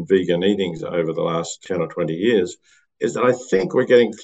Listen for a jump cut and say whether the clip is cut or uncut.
cut